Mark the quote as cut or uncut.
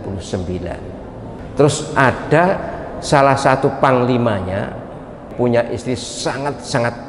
cut